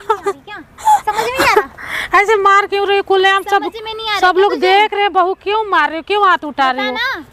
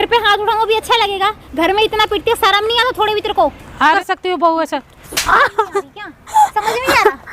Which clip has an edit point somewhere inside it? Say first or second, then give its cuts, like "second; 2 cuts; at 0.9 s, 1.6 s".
second; 1 cut; at 4.0 s